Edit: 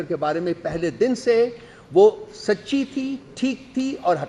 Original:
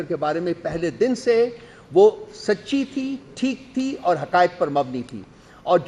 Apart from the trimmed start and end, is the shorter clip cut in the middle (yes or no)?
no